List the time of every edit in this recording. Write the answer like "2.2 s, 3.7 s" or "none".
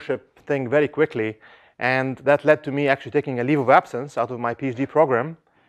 1.5 s